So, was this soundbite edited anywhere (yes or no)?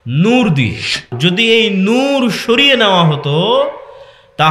yes